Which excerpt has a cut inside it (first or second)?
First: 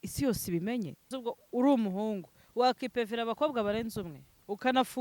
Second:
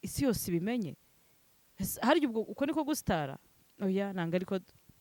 first